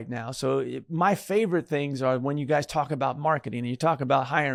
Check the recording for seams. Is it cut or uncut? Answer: uncut